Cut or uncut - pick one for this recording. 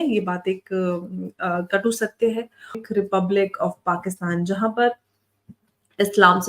cut